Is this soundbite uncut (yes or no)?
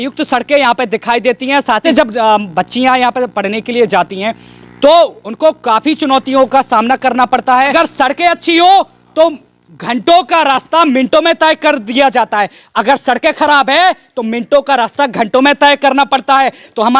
no